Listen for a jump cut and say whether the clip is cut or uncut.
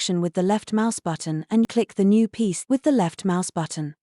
cut